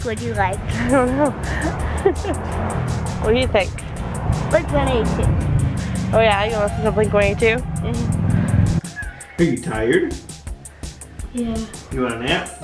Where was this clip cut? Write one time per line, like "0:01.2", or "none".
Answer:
0:08.8